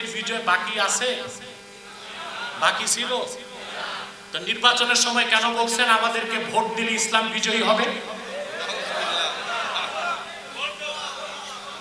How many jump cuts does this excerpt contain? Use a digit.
0